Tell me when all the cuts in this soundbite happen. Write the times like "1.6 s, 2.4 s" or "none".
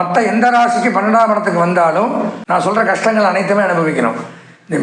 2.4 s